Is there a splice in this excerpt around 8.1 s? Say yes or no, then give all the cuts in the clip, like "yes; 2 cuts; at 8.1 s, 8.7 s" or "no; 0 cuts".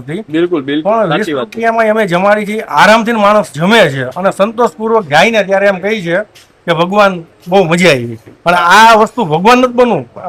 no; 0 cuts